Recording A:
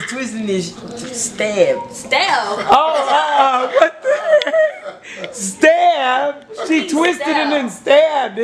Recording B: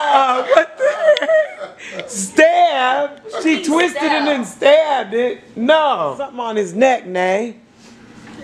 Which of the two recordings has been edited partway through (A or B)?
B